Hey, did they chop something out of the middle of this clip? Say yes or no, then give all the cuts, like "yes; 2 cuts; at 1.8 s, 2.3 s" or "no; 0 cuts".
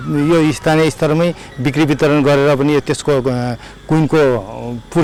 no; 0 cuts